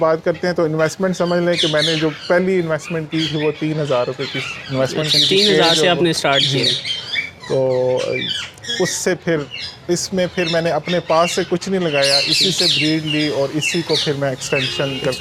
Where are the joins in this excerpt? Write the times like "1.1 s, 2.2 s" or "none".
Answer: none